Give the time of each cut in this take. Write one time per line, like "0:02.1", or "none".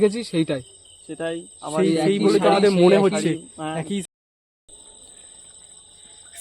0:04.0